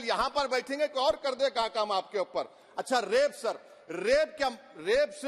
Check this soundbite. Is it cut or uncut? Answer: uncut